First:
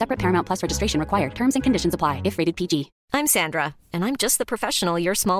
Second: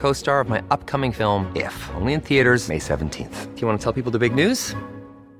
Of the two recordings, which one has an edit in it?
first; 1 cut; at 3.0 s

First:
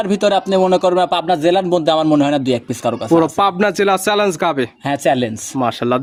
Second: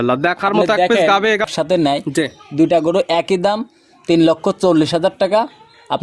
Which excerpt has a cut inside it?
second; 1 cut; at 1.4 s

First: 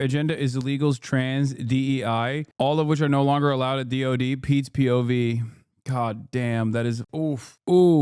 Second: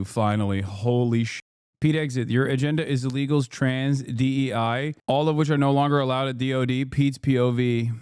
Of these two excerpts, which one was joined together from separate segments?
first; 1 cut; at 7.1 s

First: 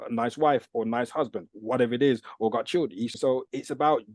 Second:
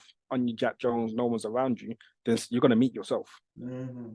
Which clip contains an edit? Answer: first; 1 cut; at 3.1 s

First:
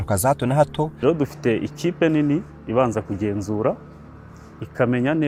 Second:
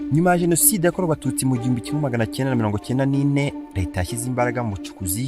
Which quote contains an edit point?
second; 1 cut; at 3.7 s

